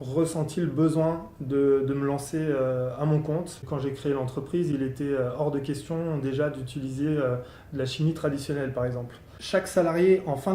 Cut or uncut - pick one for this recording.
cut